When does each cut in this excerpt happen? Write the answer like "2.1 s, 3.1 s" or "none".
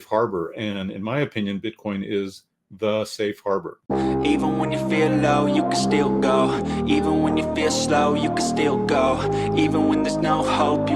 3.7 s